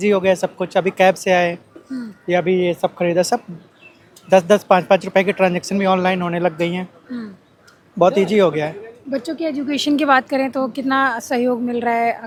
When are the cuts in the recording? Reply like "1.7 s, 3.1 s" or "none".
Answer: none